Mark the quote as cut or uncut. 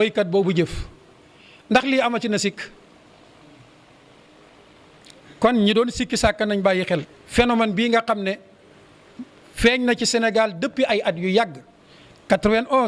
cut